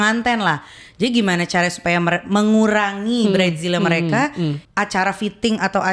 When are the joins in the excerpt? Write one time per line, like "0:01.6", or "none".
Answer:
0:04.6